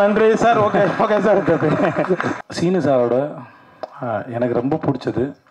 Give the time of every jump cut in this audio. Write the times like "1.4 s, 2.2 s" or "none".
2.3 s